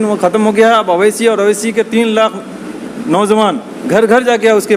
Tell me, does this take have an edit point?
no; 0 cuts

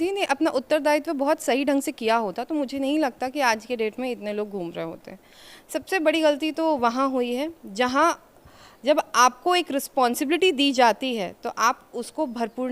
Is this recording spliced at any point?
no; 0 cuts

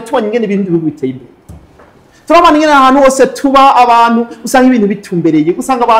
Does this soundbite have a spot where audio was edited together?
no; 0 cuts

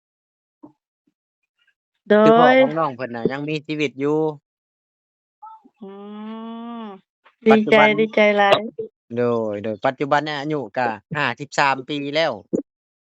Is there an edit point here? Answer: no; 0 cuts

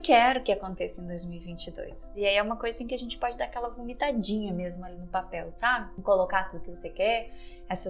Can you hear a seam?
yes; 2 cuts; at 2.1 s, 5.9 s

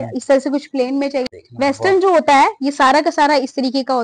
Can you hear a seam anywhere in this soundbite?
yes; 1 cut; at 1.3 s

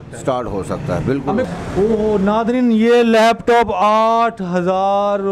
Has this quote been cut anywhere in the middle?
yes; 1 cut; at 1.5 s

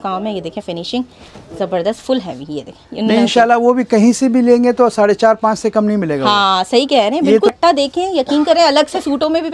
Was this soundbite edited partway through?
yes; 2 cuts; at 2.8 s, 7.5 s

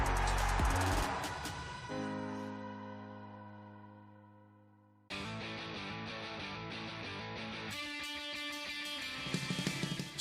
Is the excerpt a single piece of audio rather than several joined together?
no; 1 cut; at 4.9 s

